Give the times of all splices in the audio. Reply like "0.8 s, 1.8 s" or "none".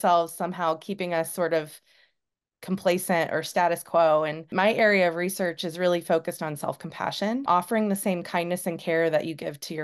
4.4 s, 7.5 s

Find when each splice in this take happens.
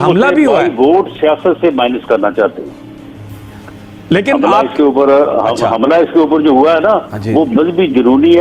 none

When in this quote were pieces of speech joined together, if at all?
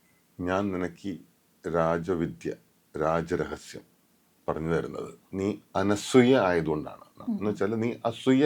5.3 s, 7.1 s

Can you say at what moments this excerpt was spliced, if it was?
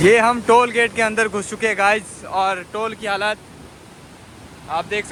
none

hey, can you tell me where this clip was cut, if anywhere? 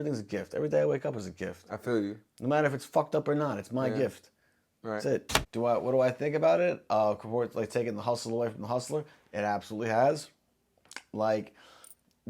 5.4 s

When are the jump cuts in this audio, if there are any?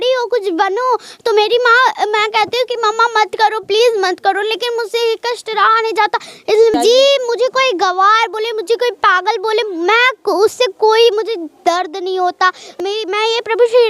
6.7 s, 12.7 s

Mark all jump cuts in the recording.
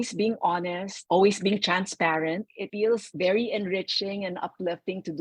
0.9 s, 2.9 s

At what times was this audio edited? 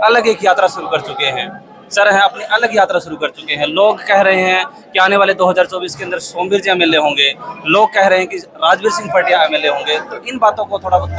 none

